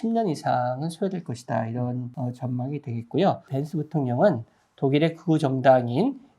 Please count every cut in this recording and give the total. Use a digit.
2